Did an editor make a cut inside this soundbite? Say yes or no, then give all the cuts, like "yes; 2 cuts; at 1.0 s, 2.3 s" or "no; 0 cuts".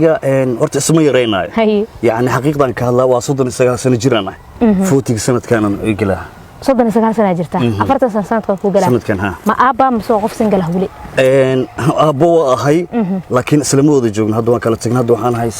no; 0 cuts